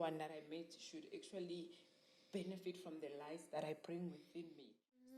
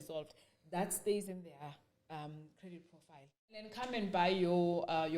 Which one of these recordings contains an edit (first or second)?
second